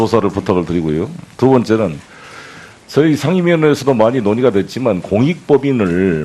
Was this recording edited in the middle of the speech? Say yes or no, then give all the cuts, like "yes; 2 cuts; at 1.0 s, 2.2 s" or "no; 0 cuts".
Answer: no; 0 cuts